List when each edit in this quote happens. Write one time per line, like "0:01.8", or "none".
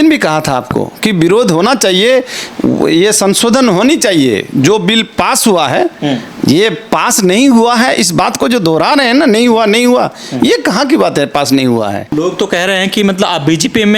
0:12.1